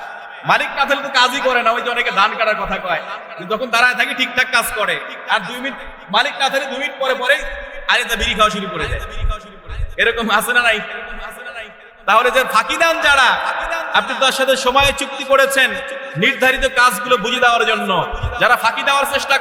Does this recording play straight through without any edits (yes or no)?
yes